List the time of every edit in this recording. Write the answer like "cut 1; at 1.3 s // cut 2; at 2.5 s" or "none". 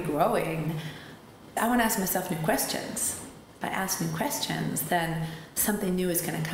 cut 1; at 1.5 s